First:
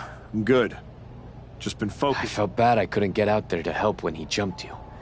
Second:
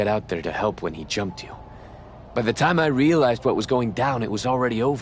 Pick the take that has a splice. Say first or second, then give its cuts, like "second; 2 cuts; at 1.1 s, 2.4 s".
first; 1 cut; at 2.3 s